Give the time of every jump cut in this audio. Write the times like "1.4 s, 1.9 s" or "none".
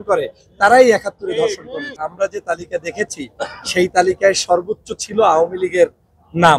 1.9 s